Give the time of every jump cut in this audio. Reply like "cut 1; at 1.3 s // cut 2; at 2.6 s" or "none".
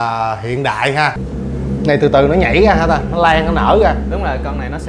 cut 1; at 1.2 s